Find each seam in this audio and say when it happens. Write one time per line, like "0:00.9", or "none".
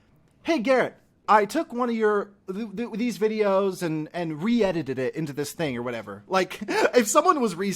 0:01.2